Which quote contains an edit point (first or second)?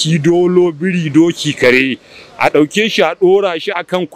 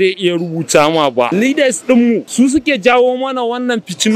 second